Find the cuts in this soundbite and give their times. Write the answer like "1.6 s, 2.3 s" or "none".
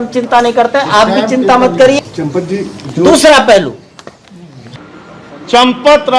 2.0 s, 4.7 s